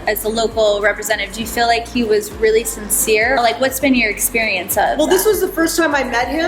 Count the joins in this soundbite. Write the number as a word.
one